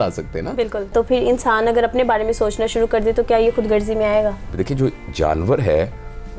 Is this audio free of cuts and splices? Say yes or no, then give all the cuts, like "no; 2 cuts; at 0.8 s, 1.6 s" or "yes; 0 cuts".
no; 2 cuts; at 0.9 s, 4.5 s